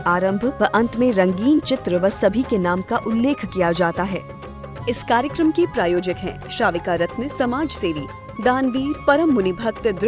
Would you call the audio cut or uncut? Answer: cut